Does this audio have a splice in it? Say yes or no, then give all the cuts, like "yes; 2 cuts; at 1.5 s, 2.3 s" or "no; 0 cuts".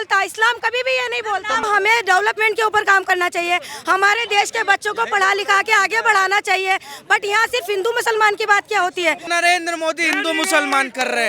yes; 2 cuts; at 1.7 s, 9.3 s